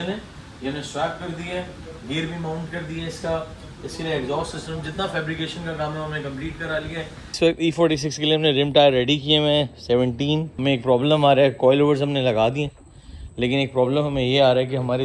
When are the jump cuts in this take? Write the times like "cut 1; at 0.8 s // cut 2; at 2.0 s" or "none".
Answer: cut 1; at 7.3 s // cut 2; at 10.5 s